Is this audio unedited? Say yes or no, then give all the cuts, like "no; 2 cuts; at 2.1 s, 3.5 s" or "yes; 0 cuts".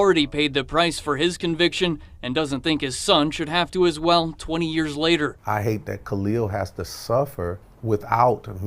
yes; 0 cuts